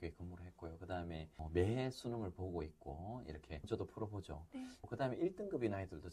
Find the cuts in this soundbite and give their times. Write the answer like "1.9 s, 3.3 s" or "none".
1.4 s